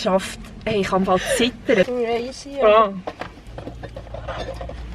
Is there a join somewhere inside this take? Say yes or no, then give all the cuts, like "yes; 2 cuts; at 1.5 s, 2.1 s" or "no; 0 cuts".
yes; 1 cut; at 1.8 s